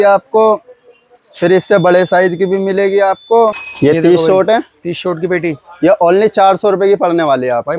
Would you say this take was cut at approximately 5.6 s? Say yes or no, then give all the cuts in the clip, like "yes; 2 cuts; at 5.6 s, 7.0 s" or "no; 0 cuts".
no; 1 cut; at 3.7 s